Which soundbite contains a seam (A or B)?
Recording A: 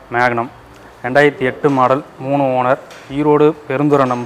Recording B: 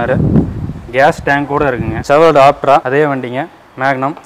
B